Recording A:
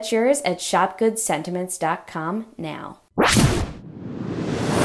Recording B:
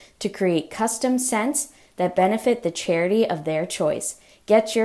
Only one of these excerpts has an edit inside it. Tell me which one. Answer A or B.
A